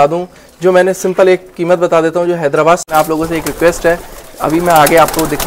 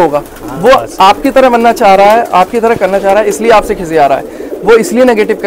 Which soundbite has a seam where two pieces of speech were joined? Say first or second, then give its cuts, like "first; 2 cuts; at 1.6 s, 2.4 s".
first; 1 cut; at 2.8 s